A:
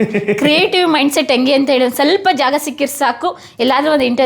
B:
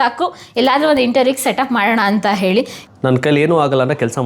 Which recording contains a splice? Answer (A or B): B